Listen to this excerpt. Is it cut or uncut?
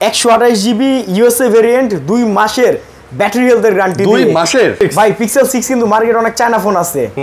cut